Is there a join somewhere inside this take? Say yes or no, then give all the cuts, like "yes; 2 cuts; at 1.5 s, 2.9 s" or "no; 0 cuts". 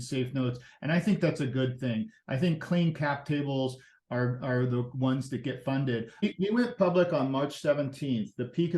yes; 1 cut; at 6.2 s